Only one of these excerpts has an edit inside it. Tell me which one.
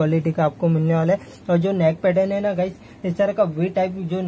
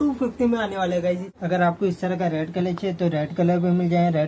second; 1 cut; at 1.3 s

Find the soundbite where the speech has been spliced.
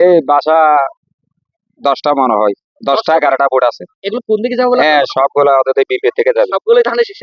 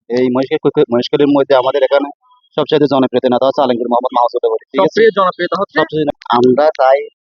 second; 1 cut; at 6.1 s

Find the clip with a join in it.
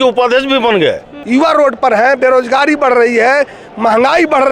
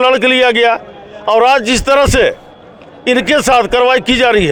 first; 1 cut; at 1.1 s

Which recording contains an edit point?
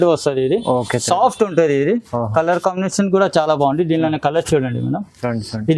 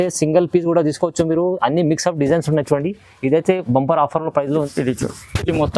second; 1 cut; at 4.7 s

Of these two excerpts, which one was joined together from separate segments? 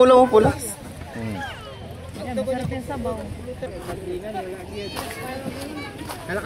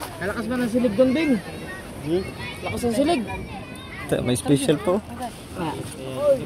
first; 1 cut; at 3.7 s

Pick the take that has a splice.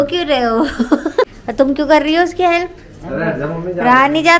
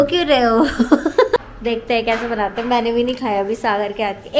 second; 1 cut; at 1.4 s

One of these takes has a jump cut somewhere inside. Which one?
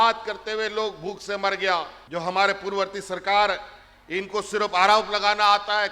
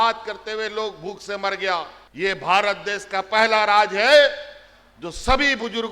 second; 1 cut; at 2.0 s

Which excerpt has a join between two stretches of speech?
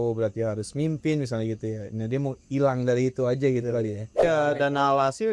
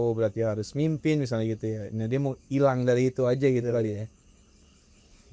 first; 1 cut; at 4.2 s

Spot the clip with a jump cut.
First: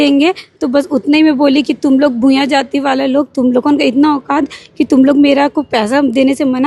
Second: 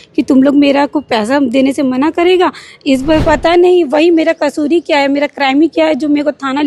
second; 1 cut; at 3.2 s

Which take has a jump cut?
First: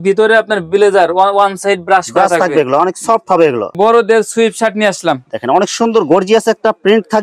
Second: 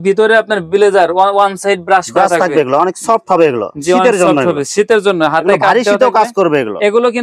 first; 1 cut; at 3.7 s

